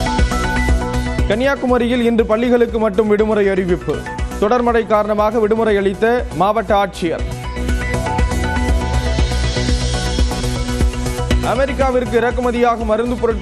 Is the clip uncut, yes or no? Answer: no